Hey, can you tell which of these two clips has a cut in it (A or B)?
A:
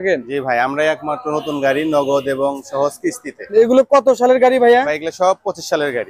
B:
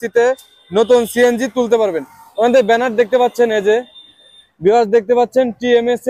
A